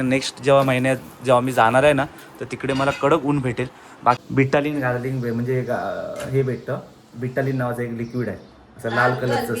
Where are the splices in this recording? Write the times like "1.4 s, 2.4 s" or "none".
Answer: 4.2 s